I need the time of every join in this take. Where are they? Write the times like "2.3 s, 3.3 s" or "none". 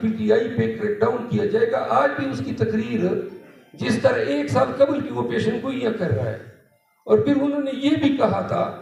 none